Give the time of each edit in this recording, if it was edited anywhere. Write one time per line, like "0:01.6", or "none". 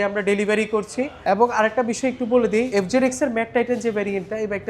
0:01.1
0:02.7